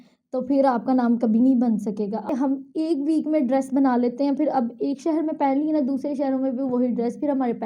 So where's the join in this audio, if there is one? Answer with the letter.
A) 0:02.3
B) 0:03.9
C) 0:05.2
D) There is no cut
A